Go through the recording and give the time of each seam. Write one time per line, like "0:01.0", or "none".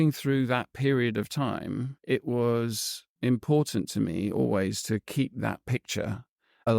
0:01.9